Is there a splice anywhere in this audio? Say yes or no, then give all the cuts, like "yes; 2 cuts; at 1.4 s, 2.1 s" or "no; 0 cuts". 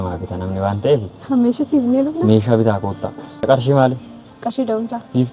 yes; 1 cut; at 3.4 s